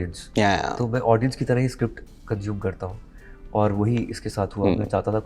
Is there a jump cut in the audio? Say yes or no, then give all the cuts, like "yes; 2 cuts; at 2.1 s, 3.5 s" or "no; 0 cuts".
no; 0 cuts